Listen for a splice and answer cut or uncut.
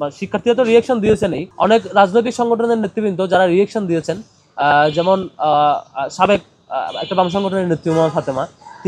cut